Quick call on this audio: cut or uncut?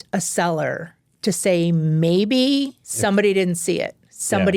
cut